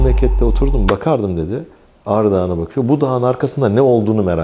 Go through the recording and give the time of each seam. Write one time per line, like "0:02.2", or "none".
none